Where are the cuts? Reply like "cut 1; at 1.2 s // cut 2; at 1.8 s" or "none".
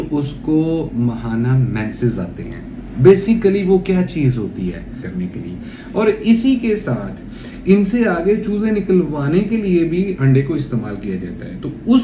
cut 1; at 5.0 s